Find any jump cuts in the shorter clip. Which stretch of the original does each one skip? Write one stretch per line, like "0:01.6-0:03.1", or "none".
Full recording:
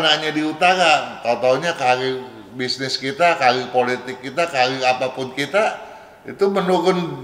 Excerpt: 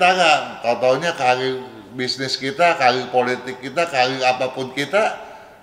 none